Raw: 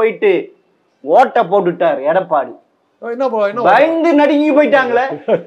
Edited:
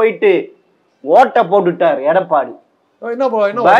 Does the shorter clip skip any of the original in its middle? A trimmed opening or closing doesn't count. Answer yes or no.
no